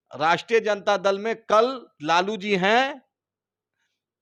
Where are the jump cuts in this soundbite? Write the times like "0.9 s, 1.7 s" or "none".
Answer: none